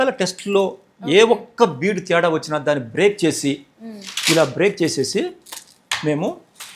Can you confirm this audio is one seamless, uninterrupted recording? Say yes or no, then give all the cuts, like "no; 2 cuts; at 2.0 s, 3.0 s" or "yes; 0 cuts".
yes; 0 cuts